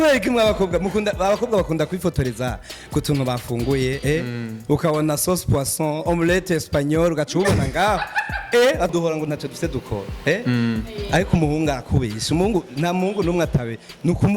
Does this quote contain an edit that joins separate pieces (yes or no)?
yes